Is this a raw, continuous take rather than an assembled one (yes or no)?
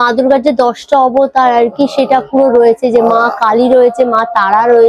yes